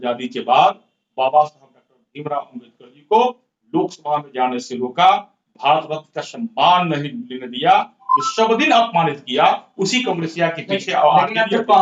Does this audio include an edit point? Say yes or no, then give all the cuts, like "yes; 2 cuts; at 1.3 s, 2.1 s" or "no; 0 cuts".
no; 0 cuts